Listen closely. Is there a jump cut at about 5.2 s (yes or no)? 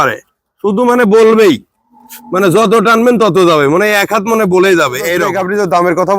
yes